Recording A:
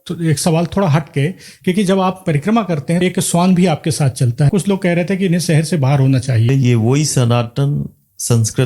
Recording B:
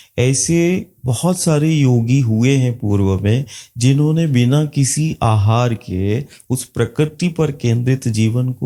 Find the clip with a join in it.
A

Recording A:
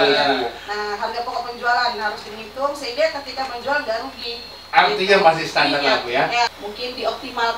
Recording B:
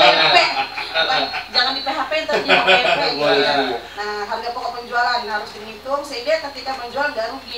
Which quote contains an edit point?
A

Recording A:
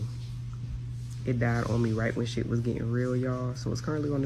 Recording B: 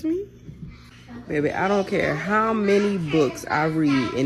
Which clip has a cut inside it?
B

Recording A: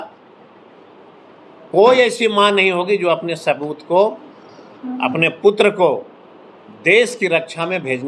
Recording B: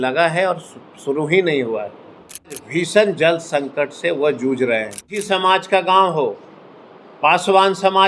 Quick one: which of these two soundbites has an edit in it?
B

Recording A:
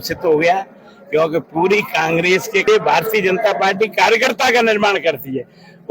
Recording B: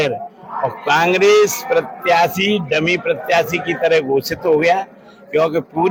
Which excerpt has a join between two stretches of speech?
A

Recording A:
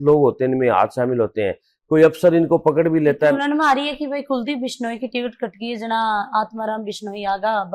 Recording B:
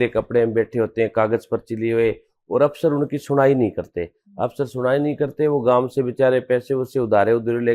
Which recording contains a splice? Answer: A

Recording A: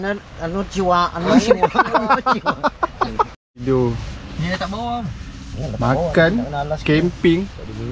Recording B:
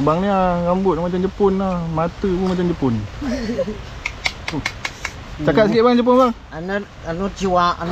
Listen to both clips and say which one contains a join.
A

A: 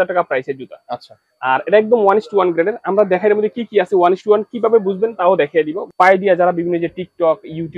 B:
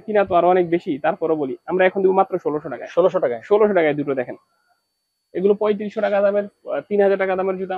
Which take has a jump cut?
A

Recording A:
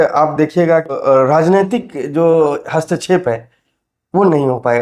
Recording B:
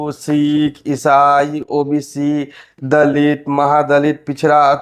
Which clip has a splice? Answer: A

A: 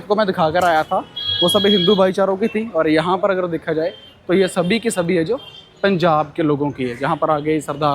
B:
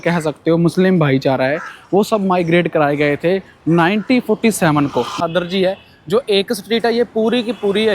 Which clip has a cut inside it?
B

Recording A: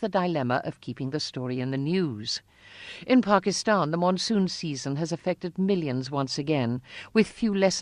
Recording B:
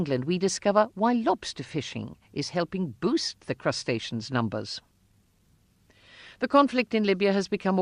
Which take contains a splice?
B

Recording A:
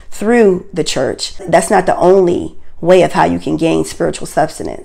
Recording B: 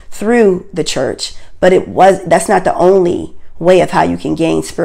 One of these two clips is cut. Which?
A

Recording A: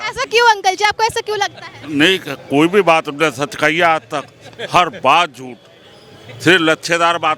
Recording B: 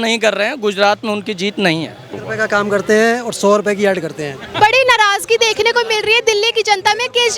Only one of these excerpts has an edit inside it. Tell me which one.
B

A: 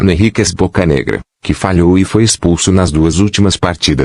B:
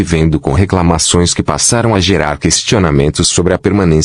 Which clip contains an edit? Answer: A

